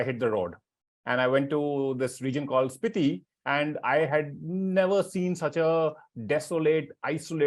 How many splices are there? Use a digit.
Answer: 1